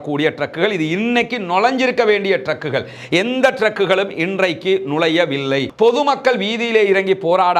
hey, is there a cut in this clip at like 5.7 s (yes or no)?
yes